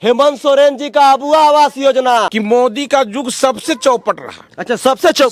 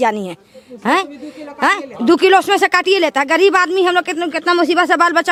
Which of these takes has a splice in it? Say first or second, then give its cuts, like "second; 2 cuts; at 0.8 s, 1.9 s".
first; 1 cut; at 2.3 s